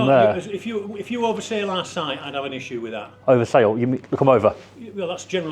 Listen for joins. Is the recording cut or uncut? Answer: uncut